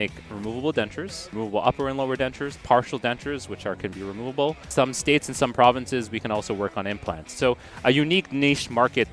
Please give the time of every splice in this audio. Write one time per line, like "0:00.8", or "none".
0:01.3
0:04.7
0:07.3

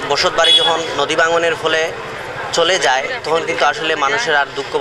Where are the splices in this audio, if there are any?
none

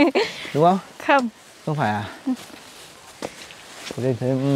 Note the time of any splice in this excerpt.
none

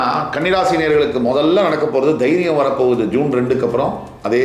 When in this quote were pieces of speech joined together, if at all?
none

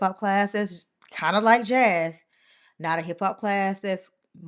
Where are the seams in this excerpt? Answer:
none

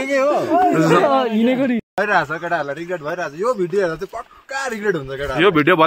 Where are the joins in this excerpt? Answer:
0:02.0

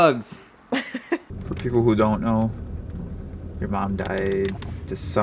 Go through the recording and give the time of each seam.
0:01.2

